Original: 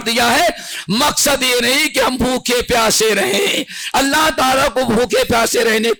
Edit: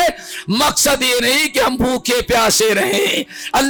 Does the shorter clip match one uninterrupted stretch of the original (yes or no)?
yes